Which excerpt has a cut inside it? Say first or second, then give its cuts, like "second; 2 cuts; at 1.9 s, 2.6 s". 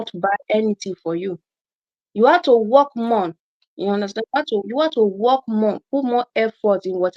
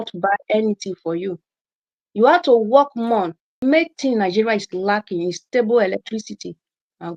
second; 1 cut; at 3.5 s